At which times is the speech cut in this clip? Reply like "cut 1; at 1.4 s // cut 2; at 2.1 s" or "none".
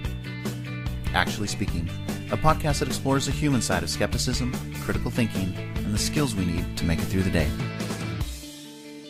none